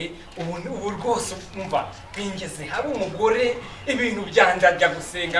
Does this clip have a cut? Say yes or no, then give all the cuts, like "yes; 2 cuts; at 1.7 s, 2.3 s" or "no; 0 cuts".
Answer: no; 0 cuts